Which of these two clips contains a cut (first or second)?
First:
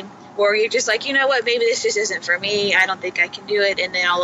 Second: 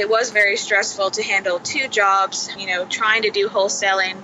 second